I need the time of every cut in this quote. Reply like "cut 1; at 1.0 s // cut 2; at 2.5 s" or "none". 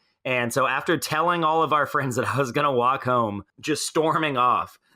cut 1; at 3.5 s

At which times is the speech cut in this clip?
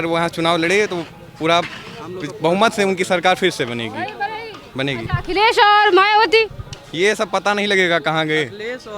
none

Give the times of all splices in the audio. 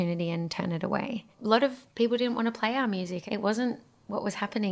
cut 1; at 1.6 s // cut 2; at 3.2 s

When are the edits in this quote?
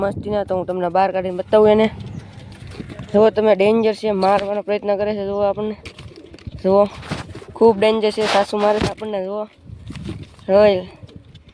none

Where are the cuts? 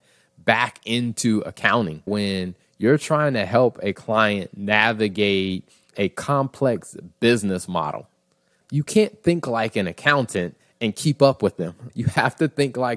cut 1; at 2.1 s // cut 2; at 5.9 s // cut 3; at 8.6 s // cut 4; at 11.8 s

